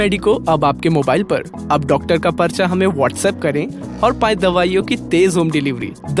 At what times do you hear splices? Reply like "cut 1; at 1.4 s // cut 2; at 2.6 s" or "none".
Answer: none